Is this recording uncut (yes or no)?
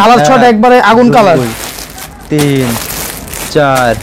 yes